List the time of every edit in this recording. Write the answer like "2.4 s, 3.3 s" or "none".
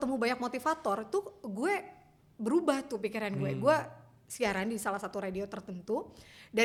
none